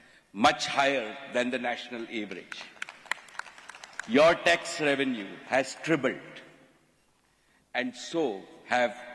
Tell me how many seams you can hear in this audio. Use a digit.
1